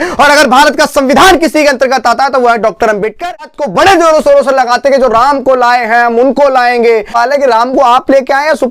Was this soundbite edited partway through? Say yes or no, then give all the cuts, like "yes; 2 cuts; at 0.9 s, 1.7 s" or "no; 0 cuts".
yes; 2 cuts; at 3.5 s, 7.1 s